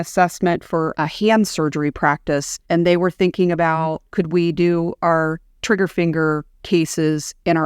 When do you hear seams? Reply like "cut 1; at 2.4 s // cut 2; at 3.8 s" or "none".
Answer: cut 1; at 2.5 s // cut 2; at 4.0 s